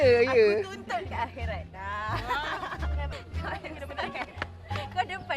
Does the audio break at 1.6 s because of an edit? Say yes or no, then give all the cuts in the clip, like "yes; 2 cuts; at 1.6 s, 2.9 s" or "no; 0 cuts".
no; 1 cut; at 3.2 s